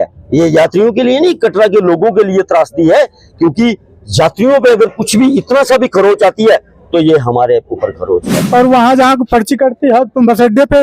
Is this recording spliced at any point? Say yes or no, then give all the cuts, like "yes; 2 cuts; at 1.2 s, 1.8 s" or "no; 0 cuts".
yes; 1 cut; at 8.4 s